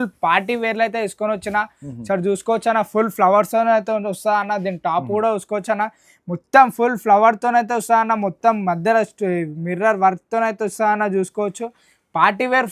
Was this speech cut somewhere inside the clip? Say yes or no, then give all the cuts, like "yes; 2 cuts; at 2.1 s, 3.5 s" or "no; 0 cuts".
no; 0 cuts